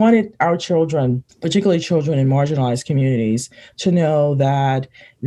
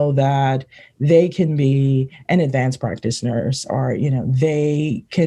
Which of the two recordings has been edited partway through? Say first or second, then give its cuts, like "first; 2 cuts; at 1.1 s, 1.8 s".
first; 1 cut; at 1.3 s